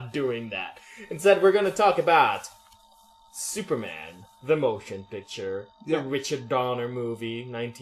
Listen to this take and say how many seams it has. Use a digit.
1